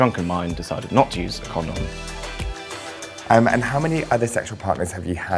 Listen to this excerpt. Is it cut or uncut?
uncut